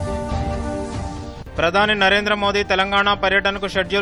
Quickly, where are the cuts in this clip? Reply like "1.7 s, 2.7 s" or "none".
1.3 s

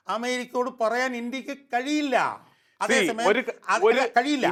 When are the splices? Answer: none

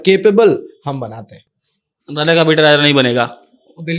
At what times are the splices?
none

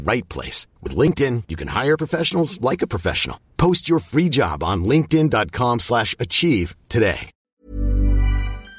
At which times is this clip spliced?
7.3 s

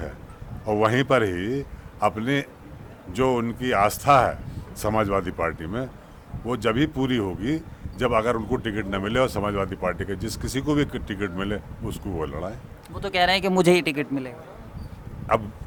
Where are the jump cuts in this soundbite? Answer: none

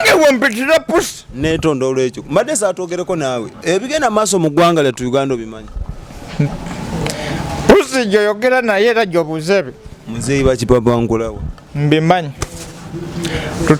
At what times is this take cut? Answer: none

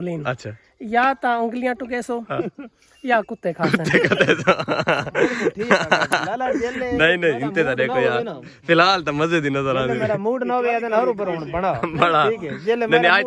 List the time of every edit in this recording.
none

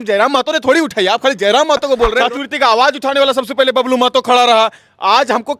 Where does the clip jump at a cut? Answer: 2.2 s

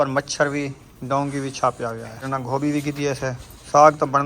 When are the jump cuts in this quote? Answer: 2.3 s

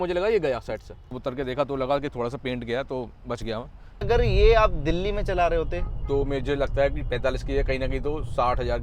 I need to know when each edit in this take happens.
1.2 s, 4.1 s

